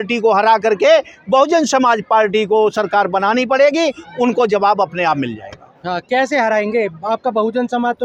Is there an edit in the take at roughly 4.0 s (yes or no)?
no